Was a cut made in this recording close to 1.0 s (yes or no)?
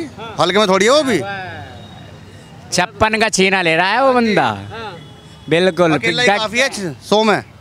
no